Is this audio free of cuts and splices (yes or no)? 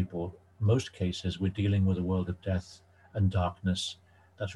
yes